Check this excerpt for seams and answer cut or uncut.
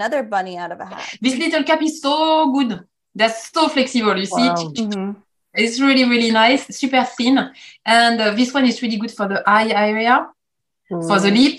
cut